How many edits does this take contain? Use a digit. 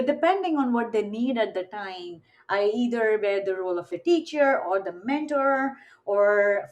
1